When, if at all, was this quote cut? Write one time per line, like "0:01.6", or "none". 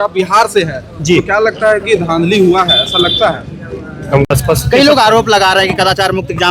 0:00.8
0:04.3